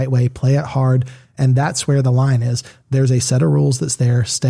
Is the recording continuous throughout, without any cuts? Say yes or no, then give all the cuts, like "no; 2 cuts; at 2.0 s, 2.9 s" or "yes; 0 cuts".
no; 1 cut; at 1.4 s